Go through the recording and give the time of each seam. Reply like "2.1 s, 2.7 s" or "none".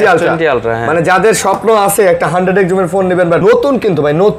3.4 s